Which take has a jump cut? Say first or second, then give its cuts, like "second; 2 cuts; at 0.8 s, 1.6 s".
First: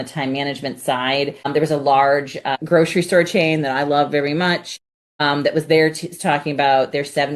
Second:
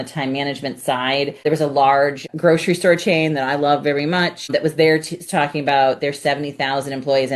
second; 3 cuts; at 1.4 s, 2.3 s, 4.5 s